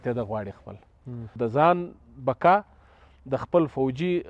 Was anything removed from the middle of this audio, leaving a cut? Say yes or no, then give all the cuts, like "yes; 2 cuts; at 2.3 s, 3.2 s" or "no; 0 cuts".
yes; 1 cut; at 1.4 s